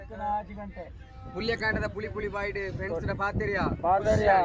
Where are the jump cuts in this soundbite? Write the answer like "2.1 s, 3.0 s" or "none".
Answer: none